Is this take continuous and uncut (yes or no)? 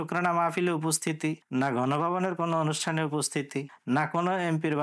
yes